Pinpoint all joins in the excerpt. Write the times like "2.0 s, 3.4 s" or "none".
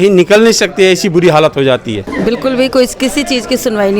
2.0 s